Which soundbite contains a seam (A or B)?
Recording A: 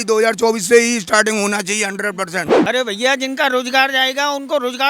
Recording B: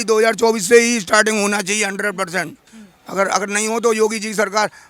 A